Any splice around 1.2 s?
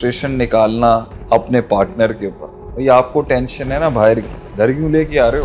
no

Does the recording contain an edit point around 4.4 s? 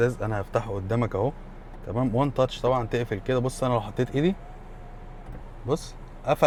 no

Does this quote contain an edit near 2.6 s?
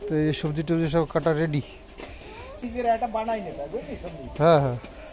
yes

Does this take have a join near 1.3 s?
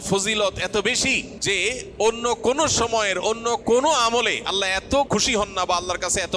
yes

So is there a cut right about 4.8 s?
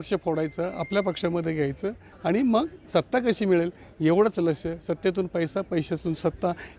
no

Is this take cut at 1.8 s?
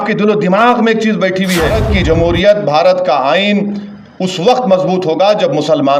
yes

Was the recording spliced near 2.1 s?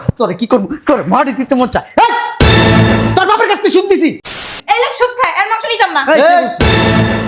no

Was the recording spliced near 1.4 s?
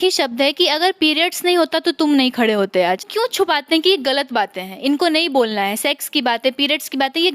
no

